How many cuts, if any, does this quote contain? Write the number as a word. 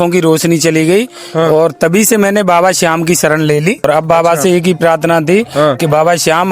one